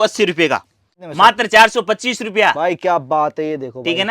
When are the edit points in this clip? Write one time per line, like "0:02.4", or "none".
0:00.9

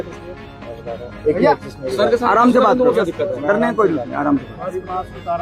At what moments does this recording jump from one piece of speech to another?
none

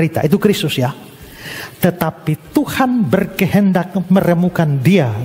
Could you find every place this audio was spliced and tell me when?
none

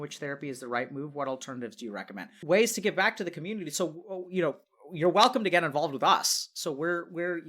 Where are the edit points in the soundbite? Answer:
0:02.3

